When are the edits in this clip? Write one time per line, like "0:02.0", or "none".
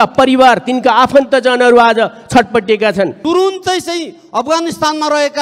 0:03.2